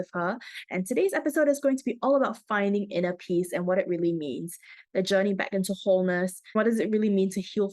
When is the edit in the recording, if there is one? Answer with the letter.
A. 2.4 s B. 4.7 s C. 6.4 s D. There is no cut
C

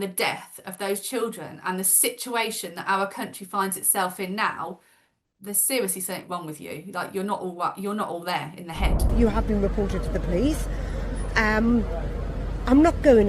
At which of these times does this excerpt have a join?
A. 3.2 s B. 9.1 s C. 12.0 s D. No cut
B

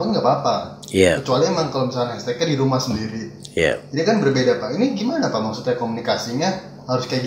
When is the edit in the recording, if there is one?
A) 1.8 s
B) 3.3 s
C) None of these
C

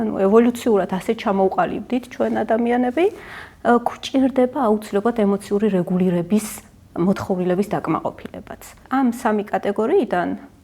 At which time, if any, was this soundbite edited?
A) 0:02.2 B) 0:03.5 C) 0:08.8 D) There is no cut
C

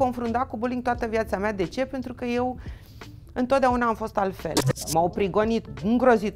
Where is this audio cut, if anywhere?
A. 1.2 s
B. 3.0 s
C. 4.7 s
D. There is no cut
C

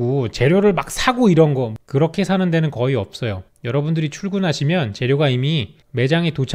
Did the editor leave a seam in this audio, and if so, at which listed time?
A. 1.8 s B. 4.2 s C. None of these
A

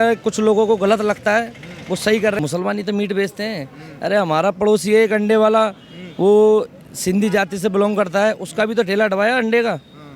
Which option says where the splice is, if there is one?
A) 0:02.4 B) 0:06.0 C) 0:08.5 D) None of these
A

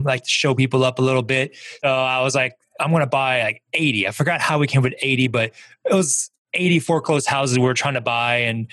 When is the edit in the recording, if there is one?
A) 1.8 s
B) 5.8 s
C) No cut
A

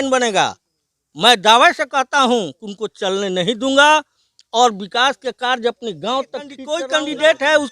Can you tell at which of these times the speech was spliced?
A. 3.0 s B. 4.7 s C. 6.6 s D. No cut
C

